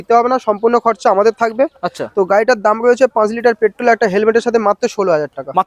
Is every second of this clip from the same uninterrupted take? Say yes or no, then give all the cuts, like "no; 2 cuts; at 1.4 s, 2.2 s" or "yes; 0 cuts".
yes; 0 cuts